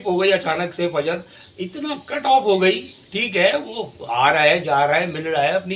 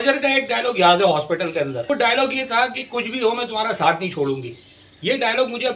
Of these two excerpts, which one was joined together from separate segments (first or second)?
second